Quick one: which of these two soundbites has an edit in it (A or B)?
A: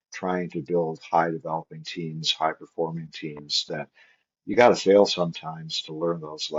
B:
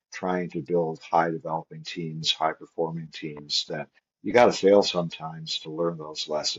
B